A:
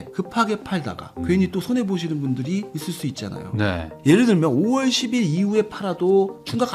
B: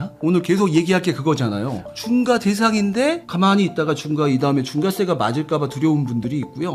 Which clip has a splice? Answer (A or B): A